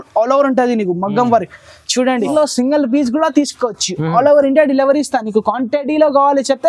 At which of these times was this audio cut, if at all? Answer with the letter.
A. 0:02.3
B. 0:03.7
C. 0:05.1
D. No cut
A